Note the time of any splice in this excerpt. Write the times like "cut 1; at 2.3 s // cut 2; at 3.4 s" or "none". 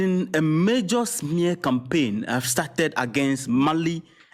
none